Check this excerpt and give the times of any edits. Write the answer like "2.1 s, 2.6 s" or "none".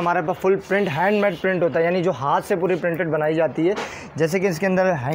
none